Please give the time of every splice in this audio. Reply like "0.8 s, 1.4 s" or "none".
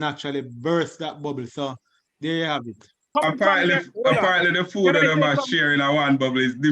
3.0 s